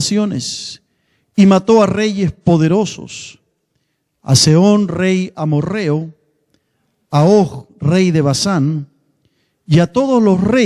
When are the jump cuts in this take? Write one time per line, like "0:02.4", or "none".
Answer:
none

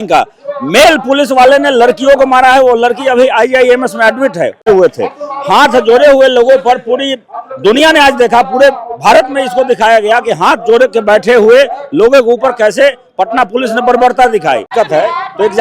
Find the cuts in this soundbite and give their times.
0:04.6
0:14.7

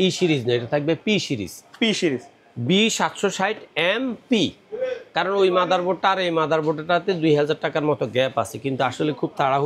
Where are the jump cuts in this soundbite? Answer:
none

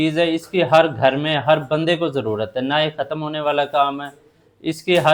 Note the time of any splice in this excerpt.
none

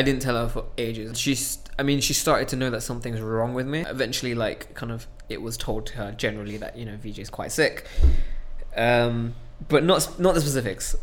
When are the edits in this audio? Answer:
0:01.2
0:03.9

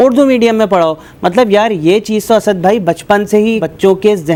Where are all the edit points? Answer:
none

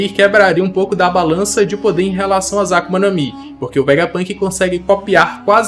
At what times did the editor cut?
none

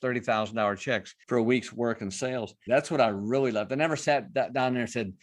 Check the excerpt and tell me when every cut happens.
0:01.1
0:02.6

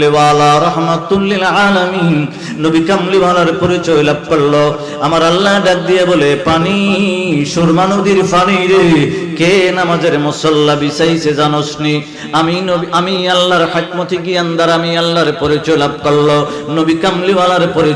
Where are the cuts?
none

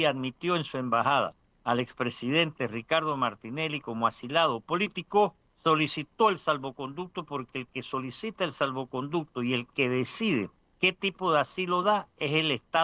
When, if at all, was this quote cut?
0:01.5
0:05.5
0:10.6

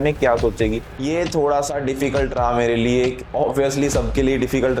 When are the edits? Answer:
0:00.9

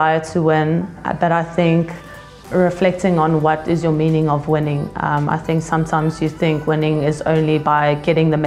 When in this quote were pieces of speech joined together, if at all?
0:01.0

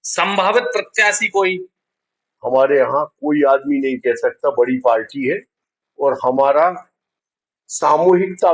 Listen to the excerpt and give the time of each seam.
none

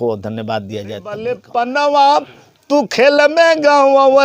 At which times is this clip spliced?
0:01.3

